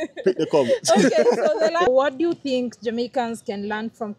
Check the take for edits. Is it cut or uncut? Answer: cut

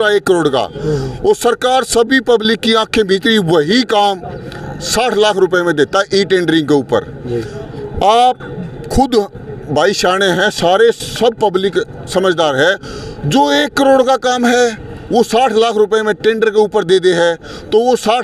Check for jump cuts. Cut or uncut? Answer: uncut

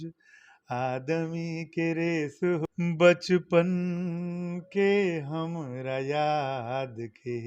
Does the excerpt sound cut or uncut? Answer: cut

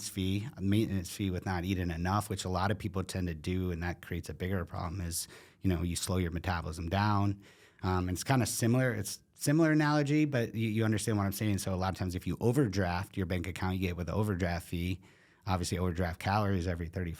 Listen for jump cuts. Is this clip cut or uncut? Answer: uncut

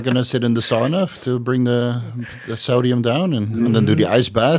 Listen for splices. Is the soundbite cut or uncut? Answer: cut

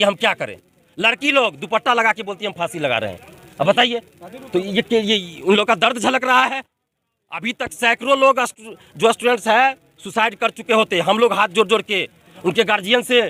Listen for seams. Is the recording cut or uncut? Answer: uncut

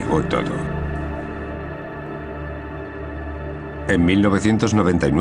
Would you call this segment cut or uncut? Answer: cut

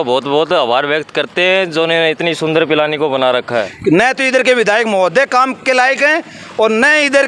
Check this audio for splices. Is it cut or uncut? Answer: cut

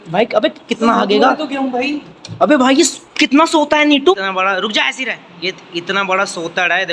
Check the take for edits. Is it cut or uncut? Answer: cut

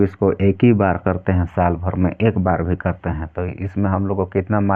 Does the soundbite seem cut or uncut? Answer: uncut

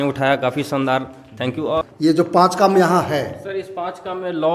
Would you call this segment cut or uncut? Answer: cut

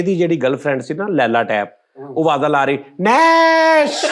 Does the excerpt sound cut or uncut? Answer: uncut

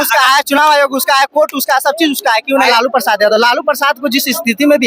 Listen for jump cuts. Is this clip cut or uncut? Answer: cut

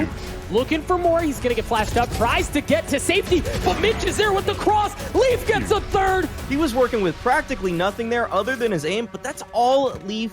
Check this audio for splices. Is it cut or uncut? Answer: cut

